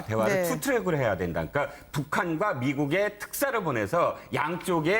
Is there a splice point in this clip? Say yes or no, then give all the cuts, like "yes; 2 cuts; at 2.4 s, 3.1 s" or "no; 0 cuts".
yes; 1 cut; at 0.9 s